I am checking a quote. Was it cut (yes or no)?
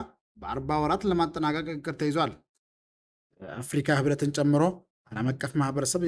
yes